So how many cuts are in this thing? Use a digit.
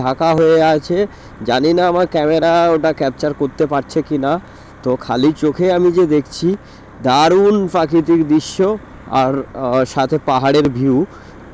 0